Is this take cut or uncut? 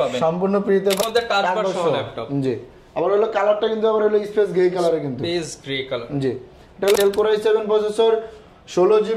cut